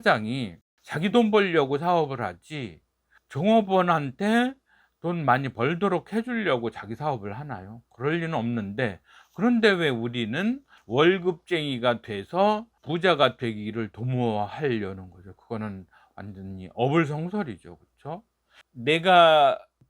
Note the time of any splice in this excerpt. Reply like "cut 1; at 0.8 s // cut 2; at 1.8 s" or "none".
cut 1; at 18.5 s